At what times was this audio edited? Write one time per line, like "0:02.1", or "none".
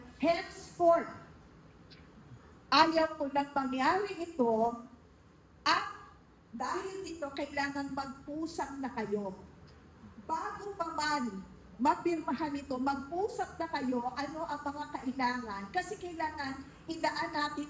none